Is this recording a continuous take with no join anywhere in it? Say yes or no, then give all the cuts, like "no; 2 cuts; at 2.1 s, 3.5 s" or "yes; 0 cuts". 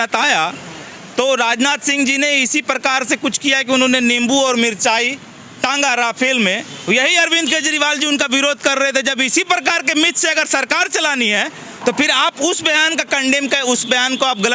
yes; 0 cuts